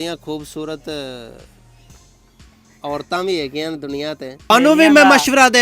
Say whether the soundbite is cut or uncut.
cut